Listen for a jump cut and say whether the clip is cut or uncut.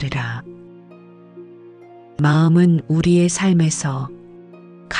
uncut